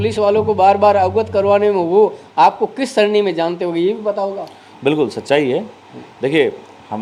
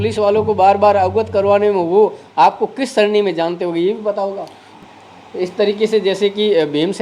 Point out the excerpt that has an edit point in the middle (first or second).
second